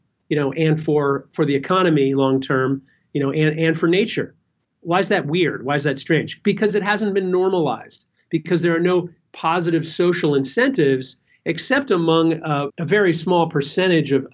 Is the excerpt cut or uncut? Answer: cut